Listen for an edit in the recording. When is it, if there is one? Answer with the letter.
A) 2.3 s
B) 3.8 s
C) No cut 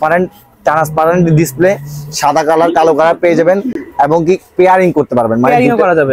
C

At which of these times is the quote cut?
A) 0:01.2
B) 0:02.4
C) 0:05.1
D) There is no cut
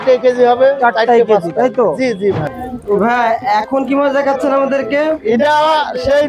B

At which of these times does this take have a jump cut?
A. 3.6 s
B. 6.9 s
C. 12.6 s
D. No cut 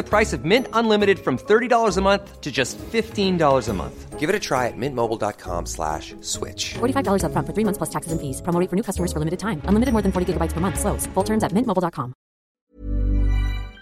C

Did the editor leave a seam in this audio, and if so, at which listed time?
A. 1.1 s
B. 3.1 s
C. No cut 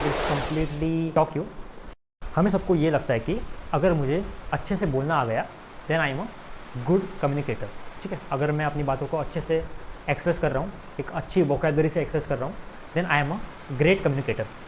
A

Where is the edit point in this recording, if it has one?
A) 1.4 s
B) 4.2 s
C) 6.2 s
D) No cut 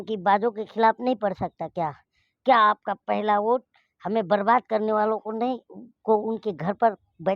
D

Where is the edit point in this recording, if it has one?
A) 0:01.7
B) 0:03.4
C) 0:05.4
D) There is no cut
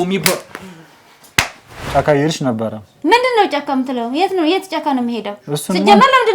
A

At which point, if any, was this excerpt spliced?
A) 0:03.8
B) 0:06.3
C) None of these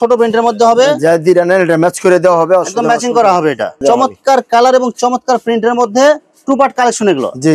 A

